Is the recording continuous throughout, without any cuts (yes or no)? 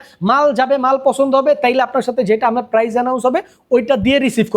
yes